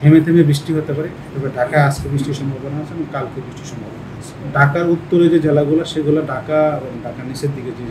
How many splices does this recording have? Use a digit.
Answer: 2